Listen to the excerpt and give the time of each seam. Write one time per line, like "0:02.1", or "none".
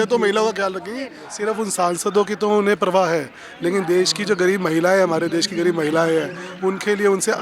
0:01.2